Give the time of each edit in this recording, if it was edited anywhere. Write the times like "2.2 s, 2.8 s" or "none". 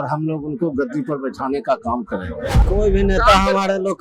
2.6 s